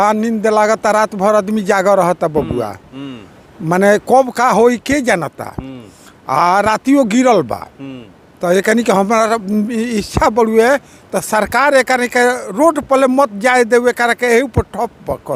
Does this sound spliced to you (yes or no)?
no